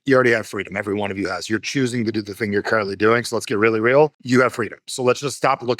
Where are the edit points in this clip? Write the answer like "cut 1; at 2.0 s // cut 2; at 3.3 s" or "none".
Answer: cut 1; at 4.2 s